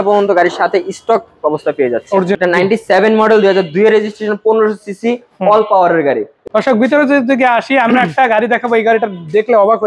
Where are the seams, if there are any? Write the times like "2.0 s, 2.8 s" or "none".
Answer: 2.4 s, 6.3 s

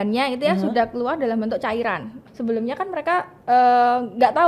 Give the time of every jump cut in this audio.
2.2 s

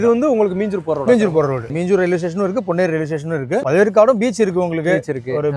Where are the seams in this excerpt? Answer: 1.7 s, 3.6 s

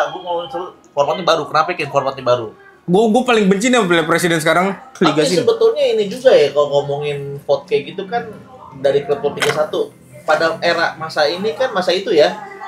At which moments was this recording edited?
4.9 s

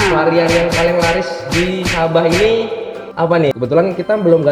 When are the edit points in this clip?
3.5 s

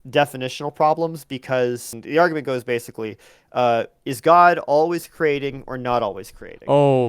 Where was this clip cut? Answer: 1.9 s

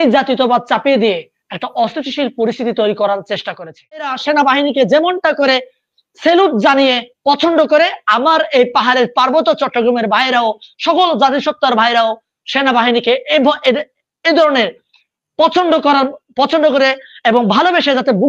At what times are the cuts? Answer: 4.2 s

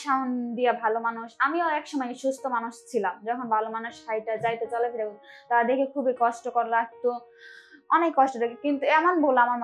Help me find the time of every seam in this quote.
none

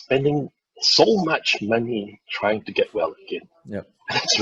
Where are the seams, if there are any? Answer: none

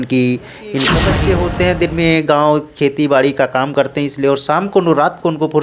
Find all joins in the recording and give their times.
0.9 s

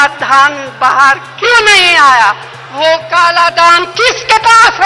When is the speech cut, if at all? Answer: none

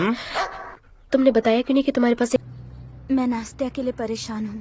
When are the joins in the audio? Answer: 2.4 s

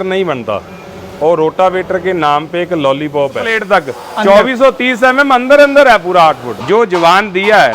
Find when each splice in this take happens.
3.5 s, 6.5 s

